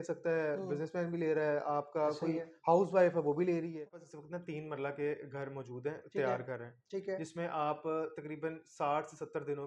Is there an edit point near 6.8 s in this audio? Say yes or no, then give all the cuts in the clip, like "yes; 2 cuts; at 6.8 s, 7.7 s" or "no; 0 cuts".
no; 1 cut; at 4.1 s